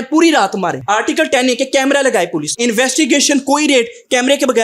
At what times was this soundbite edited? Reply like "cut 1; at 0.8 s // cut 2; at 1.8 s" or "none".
cut 1; at 0.8 s // cut 2; at 2.5 s